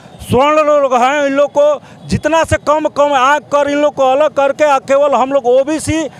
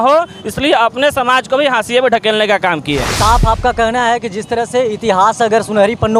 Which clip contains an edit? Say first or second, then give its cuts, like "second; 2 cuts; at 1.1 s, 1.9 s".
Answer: second; 1 cut; at 3.1 s